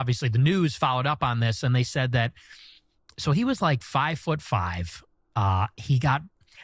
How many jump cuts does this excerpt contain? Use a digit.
1